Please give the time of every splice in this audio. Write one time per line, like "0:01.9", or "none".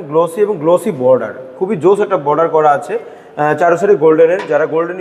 none